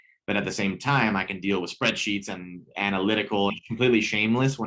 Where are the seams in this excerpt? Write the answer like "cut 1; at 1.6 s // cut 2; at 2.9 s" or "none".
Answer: cut 1; at 3.6 s